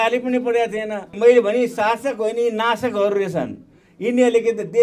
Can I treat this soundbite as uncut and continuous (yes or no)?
no